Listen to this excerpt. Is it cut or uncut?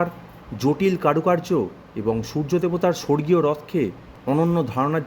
cut